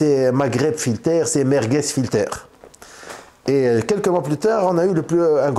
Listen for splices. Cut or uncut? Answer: uncut